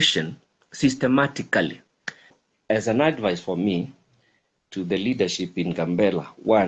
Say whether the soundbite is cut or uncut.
cut